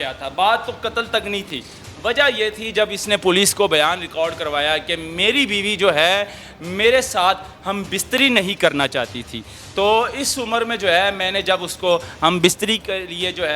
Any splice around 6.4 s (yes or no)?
no